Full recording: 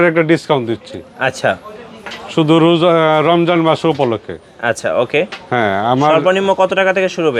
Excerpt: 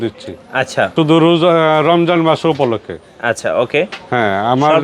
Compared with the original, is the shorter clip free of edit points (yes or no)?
no